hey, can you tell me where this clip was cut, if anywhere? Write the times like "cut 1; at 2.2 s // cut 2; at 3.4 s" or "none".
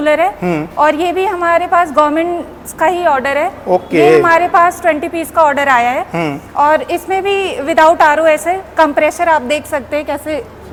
none